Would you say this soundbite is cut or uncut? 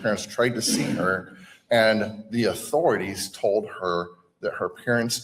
uncut